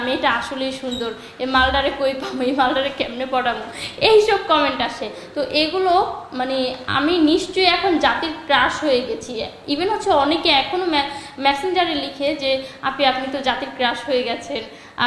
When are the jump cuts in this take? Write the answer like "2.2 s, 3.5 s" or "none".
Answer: none